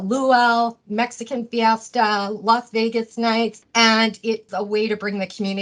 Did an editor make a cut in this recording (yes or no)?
yes